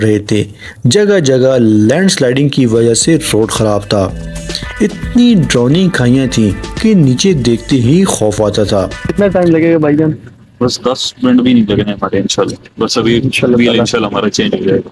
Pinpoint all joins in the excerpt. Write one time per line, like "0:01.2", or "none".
0:09.0